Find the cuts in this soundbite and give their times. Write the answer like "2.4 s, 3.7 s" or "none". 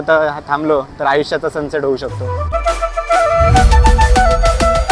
2.5 s